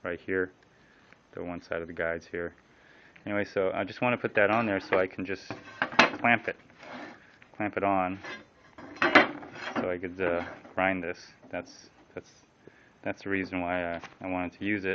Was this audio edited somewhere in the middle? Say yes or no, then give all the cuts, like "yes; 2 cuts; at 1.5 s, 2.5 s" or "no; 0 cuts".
yes; 1 cut; at 12.4 s